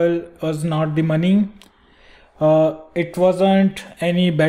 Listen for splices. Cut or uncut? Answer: uncut